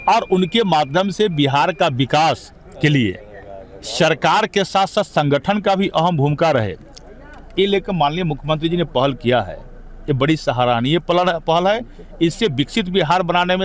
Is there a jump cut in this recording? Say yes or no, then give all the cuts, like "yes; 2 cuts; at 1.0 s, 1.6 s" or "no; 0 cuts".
no; 0 cuts